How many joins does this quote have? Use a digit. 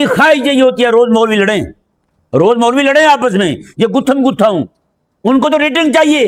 0